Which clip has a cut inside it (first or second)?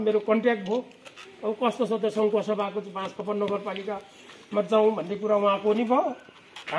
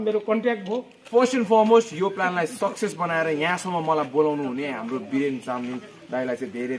second